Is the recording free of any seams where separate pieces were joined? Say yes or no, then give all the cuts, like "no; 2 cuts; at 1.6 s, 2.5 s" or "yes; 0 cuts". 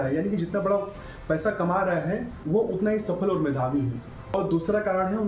no; 1 cut; at 4.1 s